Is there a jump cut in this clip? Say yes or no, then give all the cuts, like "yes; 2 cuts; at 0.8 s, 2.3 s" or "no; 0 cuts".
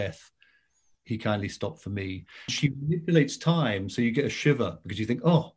yes; 1 cut; at 2.5 s